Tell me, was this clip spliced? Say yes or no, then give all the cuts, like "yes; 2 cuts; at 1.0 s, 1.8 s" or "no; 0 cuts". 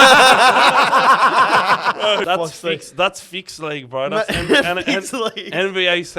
yes; 1 cut; at 2.2 s